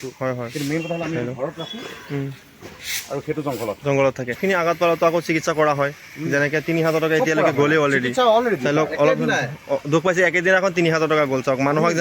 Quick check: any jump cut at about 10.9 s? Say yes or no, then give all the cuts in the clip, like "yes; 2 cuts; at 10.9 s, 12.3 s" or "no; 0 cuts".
no; 1 cut; at 4.4 s